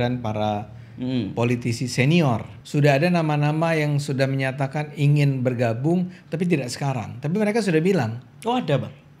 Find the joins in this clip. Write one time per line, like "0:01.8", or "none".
0:02.5